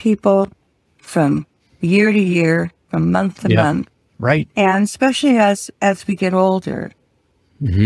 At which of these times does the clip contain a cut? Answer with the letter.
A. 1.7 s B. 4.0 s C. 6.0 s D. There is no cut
D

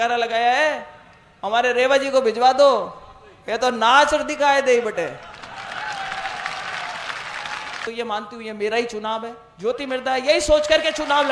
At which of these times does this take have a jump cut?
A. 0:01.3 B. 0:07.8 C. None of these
B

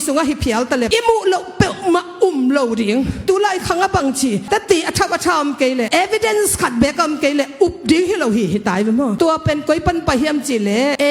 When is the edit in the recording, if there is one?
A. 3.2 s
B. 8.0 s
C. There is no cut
A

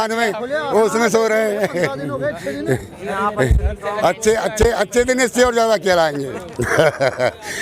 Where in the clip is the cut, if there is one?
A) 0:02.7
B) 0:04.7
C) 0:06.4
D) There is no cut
C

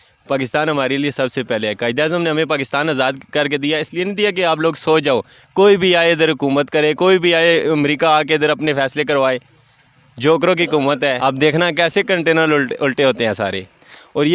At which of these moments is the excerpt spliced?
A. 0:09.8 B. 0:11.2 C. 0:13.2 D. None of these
B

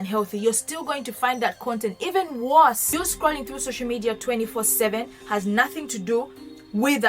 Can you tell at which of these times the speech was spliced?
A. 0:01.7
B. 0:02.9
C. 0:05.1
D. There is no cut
B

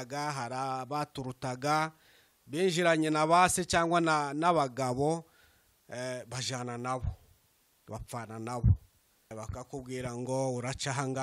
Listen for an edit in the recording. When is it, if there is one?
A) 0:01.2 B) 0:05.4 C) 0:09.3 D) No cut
C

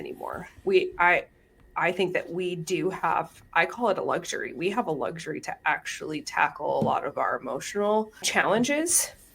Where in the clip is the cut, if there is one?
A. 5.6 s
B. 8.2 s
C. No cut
B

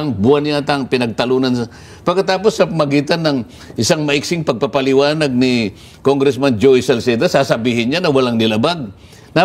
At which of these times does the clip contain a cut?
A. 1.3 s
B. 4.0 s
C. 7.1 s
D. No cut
D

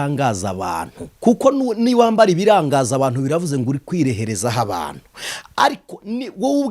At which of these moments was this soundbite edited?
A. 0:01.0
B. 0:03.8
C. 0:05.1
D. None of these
A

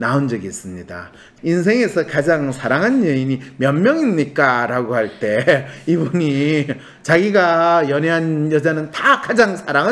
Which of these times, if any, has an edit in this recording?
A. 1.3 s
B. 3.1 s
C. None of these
A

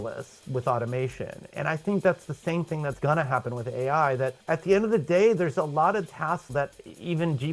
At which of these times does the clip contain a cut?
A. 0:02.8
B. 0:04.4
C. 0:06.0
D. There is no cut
B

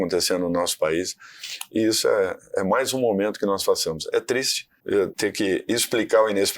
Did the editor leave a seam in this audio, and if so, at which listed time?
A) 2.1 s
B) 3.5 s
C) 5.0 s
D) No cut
C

